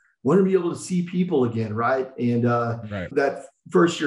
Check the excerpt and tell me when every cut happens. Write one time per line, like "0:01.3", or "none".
0:03.1